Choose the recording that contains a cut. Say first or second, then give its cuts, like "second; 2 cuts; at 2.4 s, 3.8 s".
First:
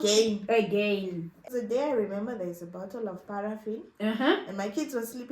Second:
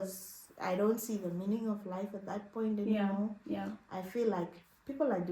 first; 1 cut; at 1.4 s